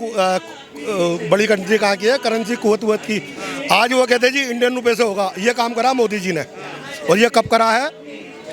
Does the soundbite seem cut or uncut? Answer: uncut